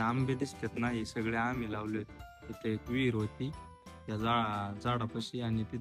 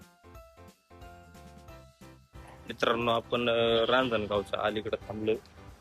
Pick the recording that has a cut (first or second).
second